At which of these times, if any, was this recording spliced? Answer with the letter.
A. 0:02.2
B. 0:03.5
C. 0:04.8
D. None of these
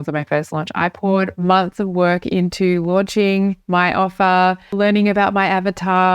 C